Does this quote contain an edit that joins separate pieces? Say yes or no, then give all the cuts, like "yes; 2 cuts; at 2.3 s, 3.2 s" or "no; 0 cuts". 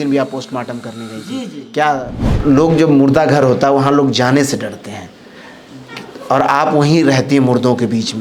yes; 1 cut; at 2.4 s